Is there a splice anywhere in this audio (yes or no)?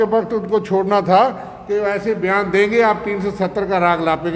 no